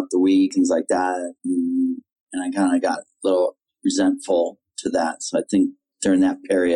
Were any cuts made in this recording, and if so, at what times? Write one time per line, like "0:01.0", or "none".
0:05.8